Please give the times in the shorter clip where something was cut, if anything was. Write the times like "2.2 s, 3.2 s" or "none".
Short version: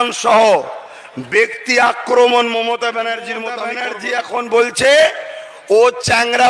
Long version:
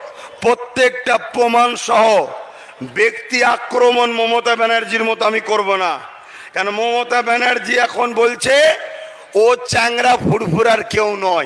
3.7 s